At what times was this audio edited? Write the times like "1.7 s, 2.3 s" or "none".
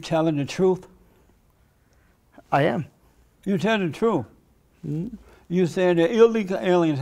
none